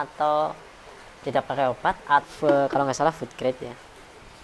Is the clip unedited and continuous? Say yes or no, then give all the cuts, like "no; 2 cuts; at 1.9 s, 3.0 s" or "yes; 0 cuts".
no; 1 cut; at 2.3 s